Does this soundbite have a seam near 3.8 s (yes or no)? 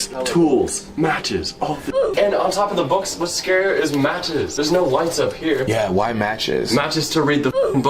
no